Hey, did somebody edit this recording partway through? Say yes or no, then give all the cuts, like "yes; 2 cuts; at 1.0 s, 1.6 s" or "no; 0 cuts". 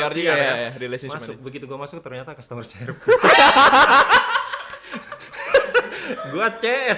no; 0 cuts